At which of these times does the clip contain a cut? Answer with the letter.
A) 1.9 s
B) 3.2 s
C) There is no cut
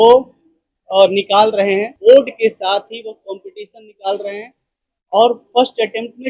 A